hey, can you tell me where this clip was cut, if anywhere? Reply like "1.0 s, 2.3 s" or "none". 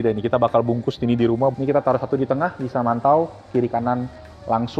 1.5 s